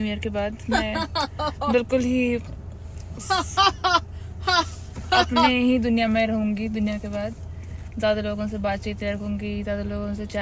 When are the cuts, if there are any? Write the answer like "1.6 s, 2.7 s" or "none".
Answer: none